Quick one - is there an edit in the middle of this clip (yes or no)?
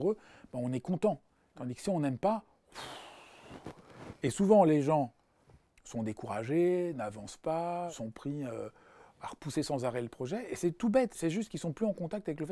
yes